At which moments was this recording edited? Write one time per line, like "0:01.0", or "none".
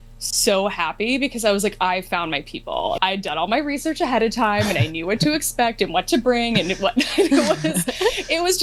0:03.0